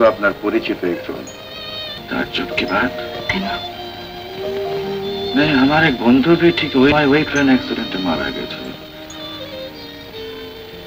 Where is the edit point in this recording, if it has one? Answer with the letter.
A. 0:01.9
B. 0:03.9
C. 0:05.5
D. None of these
A